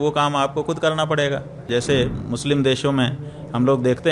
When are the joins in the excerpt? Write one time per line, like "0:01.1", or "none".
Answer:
0:01.6